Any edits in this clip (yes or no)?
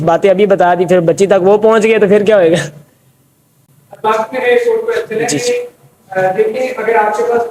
no